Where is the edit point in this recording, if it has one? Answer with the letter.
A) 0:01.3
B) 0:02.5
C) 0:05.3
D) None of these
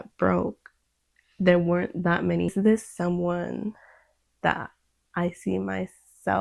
B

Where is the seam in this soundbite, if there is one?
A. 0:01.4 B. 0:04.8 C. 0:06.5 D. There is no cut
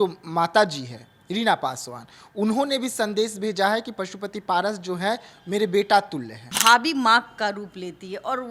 C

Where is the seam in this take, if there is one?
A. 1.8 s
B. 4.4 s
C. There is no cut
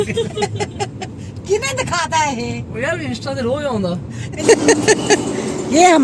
B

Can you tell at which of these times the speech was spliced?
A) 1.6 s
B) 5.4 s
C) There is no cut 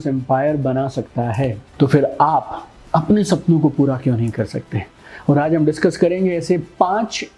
A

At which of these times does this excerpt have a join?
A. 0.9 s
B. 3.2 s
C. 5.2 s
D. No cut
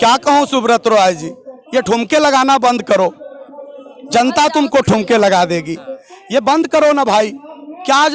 D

